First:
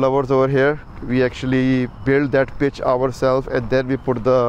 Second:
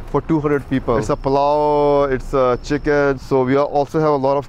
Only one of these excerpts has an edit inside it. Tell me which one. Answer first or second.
second